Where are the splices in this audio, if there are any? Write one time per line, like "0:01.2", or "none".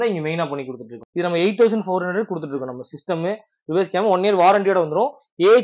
0:01.0